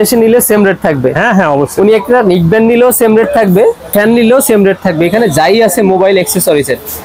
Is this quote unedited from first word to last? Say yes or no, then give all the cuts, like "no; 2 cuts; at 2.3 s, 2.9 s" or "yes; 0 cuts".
yes; 0 cuts